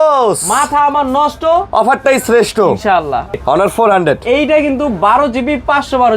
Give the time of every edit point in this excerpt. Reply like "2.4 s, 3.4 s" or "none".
3.4 s